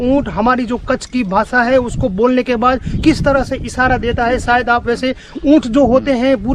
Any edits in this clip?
no; 0 cuts

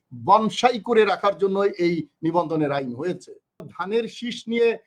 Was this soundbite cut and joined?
yes; 1 cut; at 3.7 s

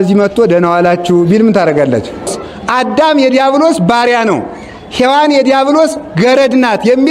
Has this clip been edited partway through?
yes; 1 cut; at 2.4 s

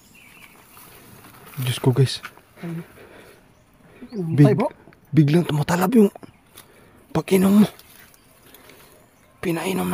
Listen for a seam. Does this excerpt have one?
no; 0 cuts

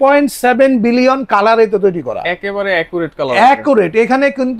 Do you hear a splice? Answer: no; 0 cuts

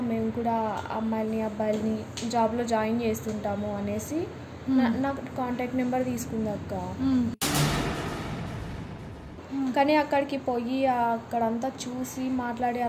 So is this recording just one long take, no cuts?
no; 1 cut; at 9.4 s

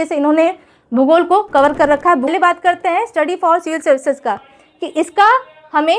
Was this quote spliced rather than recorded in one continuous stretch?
yes; 1 cut; at 2.3 s

